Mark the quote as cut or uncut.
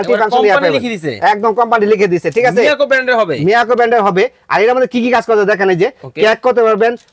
uncut